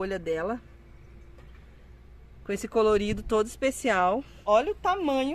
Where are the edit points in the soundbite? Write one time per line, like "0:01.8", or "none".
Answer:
0:04.4